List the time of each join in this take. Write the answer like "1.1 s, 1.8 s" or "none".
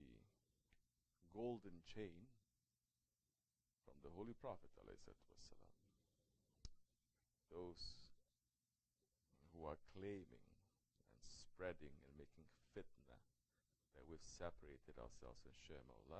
none